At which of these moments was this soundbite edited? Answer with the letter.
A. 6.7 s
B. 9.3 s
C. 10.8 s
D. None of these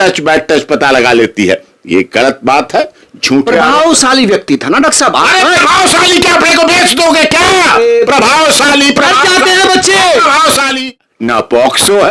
C